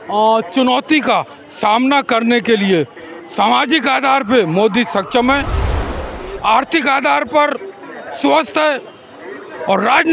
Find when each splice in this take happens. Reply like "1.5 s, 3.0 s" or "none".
none